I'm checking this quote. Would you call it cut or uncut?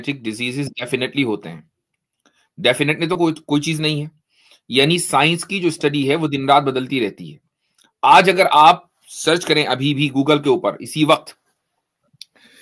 uncut